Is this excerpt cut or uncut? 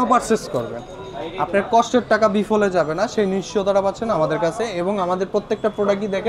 uncut